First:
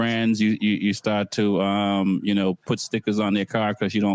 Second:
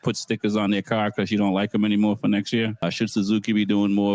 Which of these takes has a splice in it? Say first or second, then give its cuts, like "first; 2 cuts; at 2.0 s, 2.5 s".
second; 1 cut; at 2.8 s